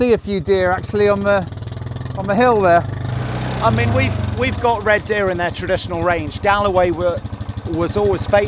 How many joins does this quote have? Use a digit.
1